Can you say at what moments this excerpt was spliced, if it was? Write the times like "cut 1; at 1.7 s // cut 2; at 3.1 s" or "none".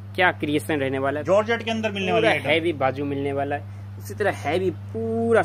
none